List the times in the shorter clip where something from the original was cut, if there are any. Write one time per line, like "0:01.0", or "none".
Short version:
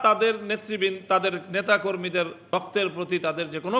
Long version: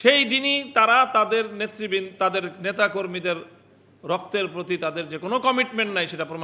0:02.4